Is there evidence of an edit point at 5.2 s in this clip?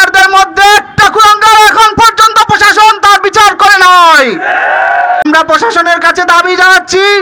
yes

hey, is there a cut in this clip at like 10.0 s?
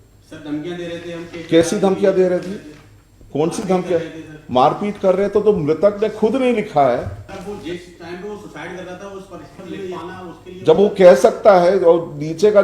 yes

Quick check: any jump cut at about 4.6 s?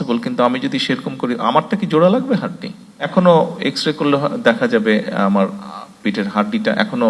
no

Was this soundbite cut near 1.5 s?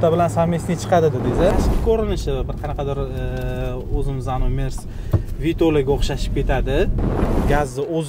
yes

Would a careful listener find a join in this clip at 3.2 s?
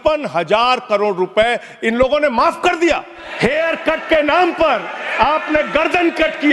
yes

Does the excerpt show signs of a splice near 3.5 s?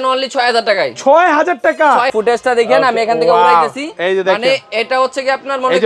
no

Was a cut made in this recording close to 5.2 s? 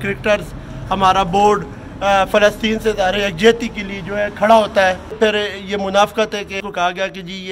yes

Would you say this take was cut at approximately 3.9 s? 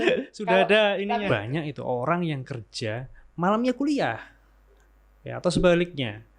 no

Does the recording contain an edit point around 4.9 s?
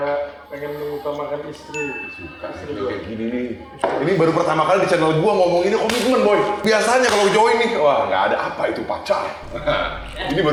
no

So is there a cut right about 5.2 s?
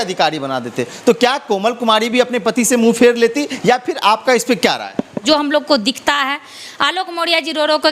yes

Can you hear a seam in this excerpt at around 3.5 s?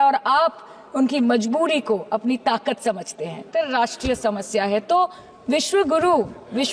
yes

